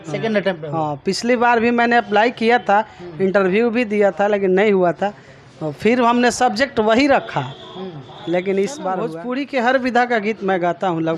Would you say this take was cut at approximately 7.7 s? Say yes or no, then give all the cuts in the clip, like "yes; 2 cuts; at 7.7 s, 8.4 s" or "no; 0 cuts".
no; 1 cut; at 9.1 s